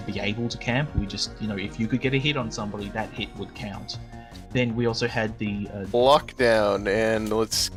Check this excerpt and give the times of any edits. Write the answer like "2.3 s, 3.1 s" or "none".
none